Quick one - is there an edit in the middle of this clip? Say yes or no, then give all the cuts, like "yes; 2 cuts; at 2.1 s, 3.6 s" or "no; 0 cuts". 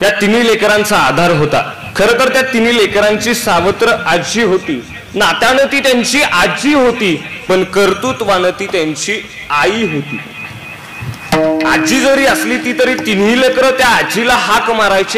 yes; 1 cut; at 1.8 s